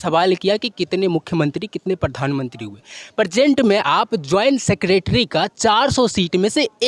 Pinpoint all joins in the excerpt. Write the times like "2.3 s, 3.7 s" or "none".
none

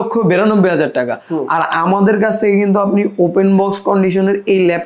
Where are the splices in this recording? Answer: none

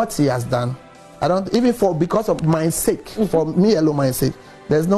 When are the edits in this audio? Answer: none

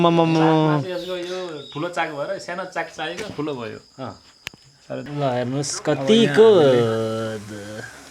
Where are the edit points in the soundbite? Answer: 5.1 s

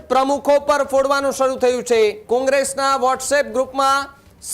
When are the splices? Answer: 2.2 s

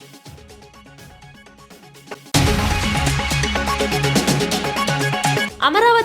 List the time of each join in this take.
2.2 s

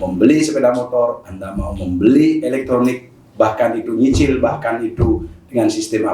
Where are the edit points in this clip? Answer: none

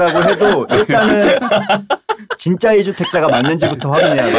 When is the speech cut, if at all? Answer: none

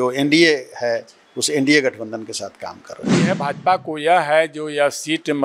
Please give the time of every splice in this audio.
3.0 s

